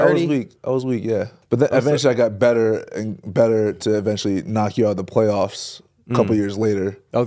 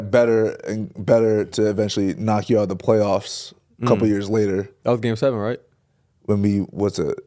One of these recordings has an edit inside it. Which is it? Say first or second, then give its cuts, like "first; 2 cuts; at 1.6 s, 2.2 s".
first; 1 cut; at 1.4 s